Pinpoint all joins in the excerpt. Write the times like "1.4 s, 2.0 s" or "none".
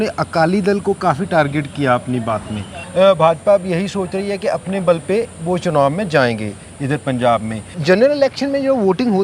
2.8 s, 7.7 s